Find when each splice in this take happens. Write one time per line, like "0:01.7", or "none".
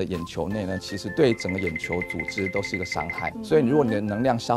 0:01.0
0:03.4

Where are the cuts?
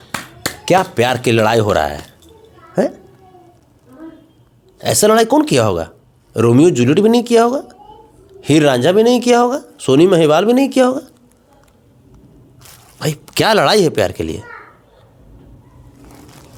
none

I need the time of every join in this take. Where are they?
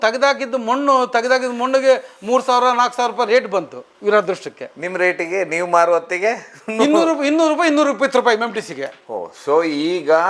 none

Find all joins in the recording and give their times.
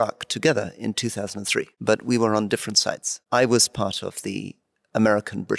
0:01.7
0:03.2

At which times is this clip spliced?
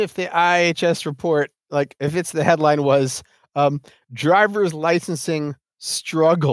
none

